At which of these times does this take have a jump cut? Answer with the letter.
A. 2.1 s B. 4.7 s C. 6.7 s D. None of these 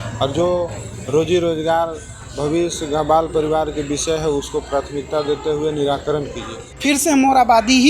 C